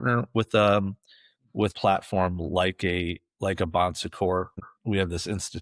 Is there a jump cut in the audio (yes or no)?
yes